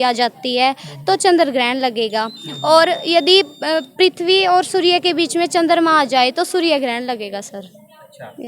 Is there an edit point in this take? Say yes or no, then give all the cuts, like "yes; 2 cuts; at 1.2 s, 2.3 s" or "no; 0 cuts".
no; 0 cuts